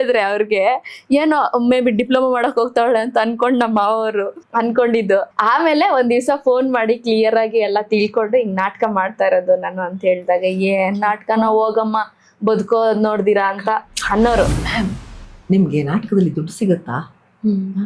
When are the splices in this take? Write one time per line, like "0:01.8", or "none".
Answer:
0:04.4
0:05.3
0:14.5